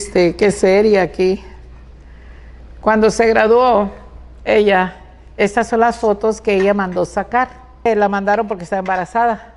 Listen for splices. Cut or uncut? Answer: cut